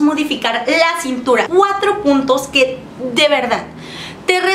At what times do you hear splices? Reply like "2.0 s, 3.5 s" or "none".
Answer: 1.5 s